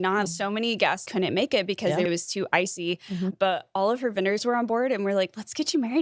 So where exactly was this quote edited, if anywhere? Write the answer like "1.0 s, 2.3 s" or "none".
2.1 s